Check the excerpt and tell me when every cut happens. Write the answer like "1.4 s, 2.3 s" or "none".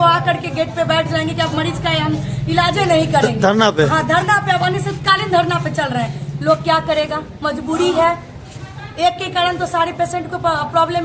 none